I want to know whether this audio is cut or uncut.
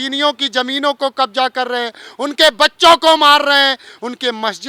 uncut